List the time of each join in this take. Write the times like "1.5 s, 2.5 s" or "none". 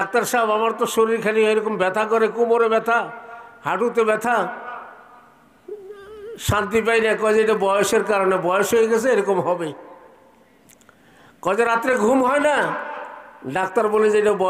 none